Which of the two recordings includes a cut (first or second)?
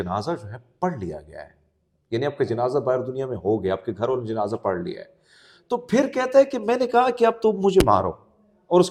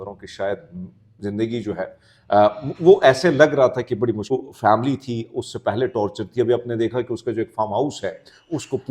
second